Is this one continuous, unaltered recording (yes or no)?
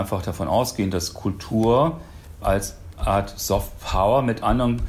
yes